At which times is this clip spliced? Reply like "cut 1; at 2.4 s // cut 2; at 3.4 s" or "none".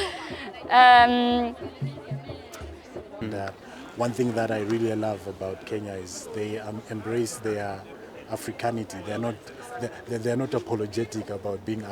cut 1; at 3.2 s